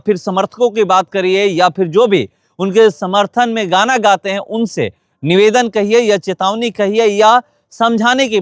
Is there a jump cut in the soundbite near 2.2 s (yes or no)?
no